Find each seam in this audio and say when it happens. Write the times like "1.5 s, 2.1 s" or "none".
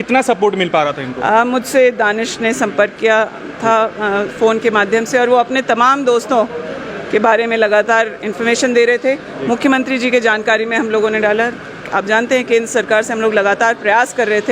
none